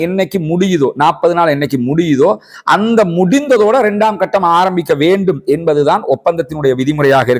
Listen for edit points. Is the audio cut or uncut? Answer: uncut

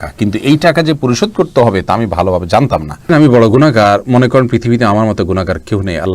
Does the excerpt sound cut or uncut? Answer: cut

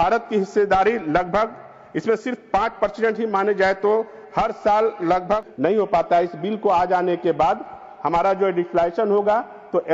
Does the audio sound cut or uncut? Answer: cut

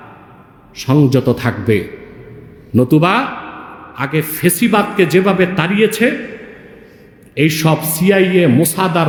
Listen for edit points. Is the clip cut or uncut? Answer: uncut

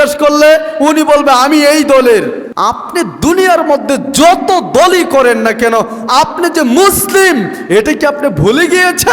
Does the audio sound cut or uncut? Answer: cut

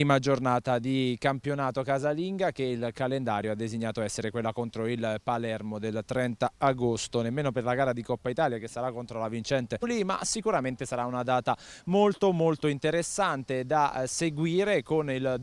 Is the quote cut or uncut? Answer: uncut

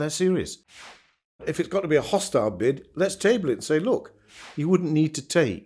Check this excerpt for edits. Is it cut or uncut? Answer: cut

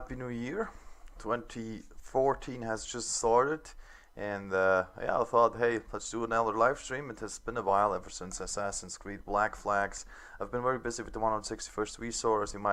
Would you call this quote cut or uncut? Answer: uncut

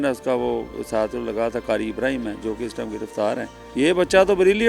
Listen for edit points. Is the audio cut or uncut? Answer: cut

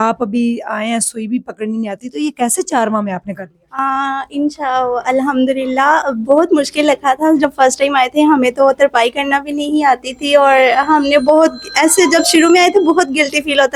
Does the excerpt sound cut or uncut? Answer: uncut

